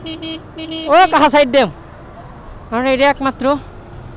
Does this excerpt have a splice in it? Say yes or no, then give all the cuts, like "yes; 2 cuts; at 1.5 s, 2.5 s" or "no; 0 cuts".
no; 0 cuts